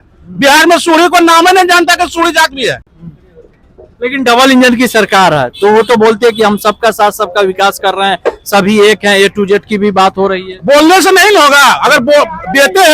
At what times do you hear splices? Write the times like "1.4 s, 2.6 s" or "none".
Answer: none